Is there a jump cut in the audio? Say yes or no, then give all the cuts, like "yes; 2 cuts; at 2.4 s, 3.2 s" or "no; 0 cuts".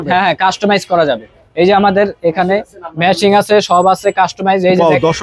no; 0 cuts